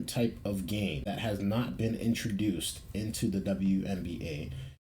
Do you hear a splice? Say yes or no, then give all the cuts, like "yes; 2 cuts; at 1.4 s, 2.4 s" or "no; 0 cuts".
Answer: yes; 1 cut; at 1.0 s